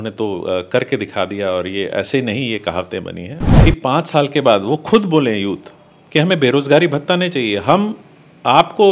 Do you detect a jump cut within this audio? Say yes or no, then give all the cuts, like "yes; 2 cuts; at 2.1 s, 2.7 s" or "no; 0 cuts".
yes; 1 cut; at 3.3 s